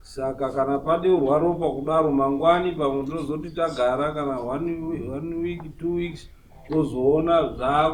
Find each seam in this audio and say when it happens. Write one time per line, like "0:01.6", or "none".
none